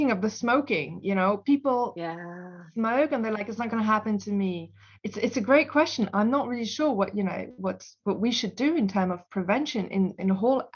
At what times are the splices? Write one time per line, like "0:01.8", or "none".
none